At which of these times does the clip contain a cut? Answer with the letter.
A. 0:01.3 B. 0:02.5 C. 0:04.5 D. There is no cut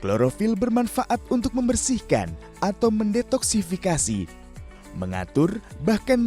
C